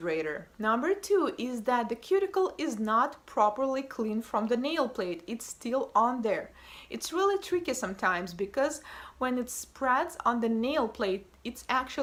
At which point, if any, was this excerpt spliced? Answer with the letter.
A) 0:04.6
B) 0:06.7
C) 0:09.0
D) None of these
D